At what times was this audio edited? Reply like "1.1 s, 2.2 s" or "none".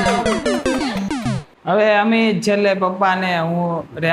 1.6 s

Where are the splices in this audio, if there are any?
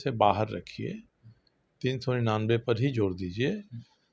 none

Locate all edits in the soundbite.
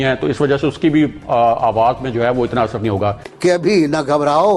3.2 s

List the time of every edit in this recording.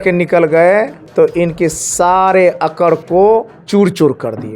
1.0 s, 3.6 s

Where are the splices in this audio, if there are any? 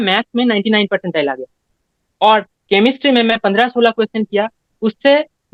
none

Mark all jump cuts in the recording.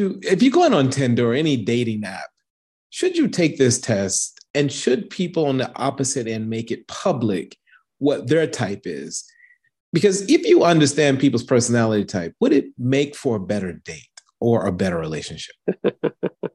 none

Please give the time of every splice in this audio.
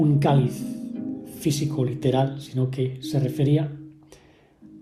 none

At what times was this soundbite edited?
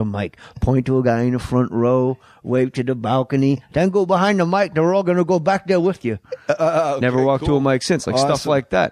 5.9 s

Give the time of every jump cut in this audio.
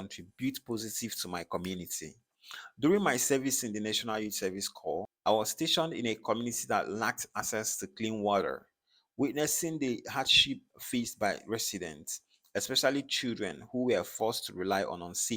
5.1 s

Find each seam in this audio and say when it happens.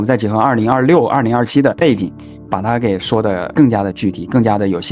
2.0 s, 3.5 s

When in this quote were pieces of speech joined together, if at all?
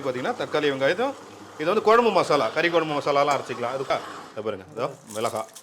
3.9 s

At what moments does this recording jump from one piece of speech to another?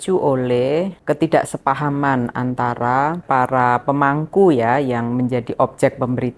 1.0 s, 3.2 s

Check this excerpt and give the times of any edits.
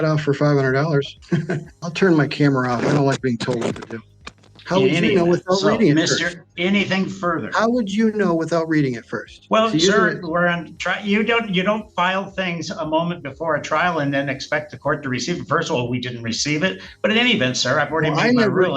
1.7 s, 4.5 s, 9.3 s

